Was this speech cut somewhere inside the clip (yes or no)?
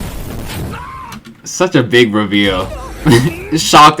no